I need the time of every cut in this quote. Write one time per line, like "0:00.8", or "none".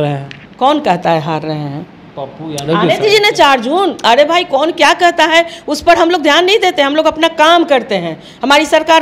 none